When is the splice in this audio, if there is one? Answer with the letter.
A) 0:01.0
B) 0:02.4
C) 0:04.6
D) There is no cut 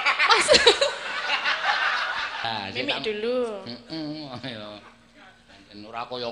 B